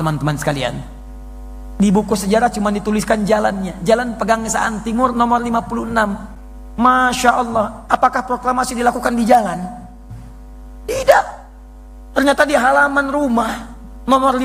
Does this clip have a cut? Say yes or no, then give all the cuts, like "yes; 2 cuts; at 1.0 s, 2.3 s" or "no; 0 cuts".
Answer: no; 0 cuts